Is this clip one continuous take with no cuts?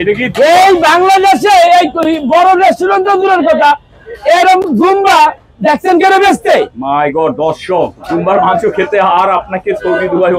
yes; 0 cuts

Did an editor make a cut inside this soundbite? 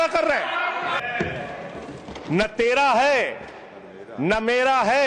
yes; 1 cut; at 1.0 s

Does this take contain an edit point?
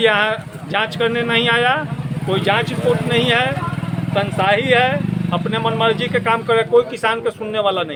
no; 0 cuts

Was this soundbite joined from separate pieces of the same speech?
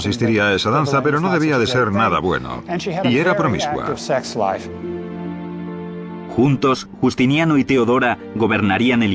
no; 0 cuts

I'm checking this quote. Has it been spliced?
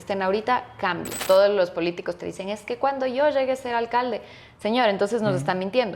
yes; 1 cut; at 1.2 s

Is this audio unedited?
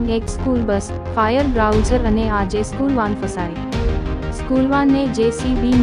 no; 2 cuts; at 3.2 s, 4.5 s

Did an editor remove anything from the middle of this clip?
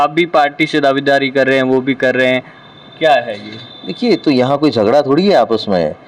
no; 0 cuts

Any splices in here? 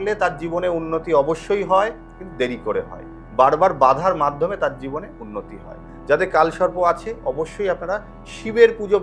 no; 0 cuts

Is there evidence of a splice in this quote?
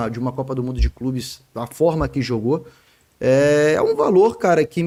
no; 0 cuts

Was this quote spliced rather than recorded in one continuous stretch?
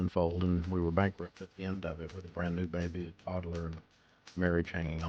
no; 0 cuts

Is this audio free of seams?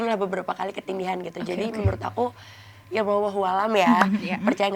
yes; 0 cuts

